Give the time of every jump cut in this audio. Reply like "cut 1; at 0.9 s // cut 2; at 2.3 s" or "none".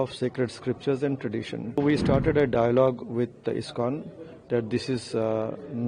cut 1; at 1.8 s